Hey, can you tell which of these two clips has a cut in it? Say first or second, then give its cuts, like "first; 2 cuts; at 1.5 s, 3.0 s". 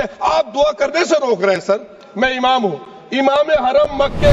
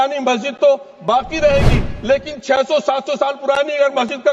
first; 1 cut; at 2.0 s